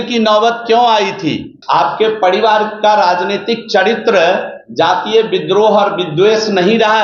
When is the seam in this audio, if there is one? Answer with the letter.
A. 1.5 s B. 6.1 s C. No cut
A